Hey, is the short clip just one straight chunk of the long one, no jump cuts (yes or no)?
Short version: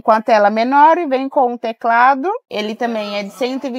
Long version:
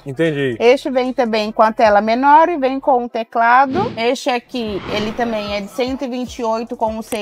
no